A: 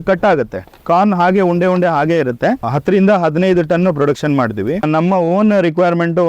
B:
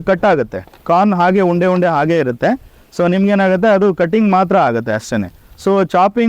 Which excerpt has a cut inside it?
A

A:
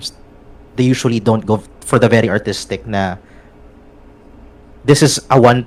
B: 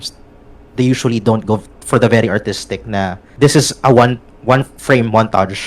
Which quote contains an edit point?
B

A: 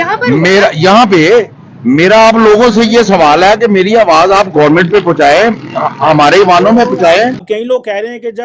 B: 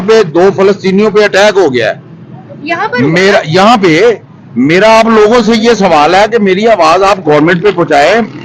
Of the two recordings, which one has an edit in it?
A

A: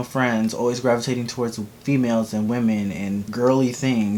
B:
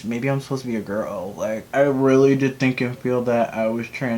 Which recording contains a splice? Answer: B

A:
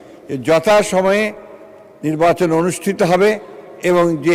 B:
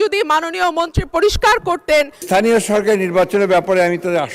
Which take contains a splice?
B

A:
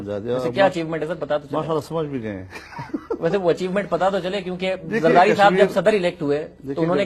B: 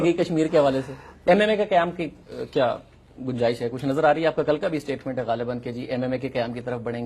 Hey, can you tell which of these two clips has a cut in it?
B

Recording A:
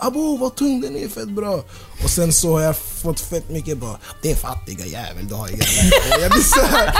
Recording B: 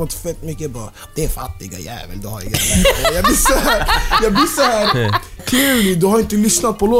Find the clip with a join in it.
B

